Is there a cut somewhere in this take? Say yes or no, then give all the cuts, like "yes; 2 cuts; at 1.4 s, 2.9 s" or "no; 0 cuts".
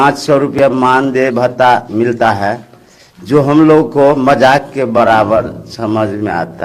no; 0 cuts